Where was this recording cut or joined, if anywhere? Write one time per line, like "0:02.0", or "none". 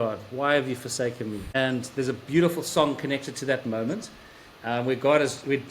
0:01.4